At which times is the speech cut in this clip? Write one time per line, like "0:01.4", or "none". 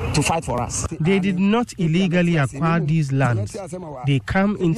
0:00.9